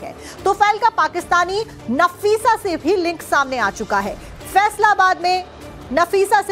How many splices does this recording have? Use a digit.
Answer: 1